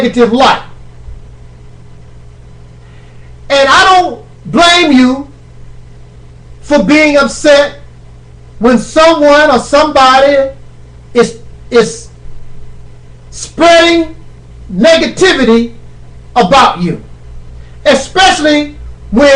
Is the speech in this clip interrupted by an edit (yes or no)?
yes